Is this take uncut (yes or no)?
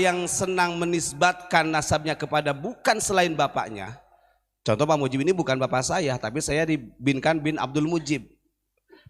yes